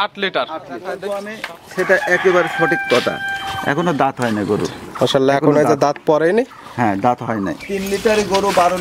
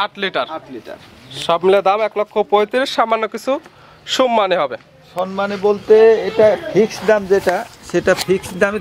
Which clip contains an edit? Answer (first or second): first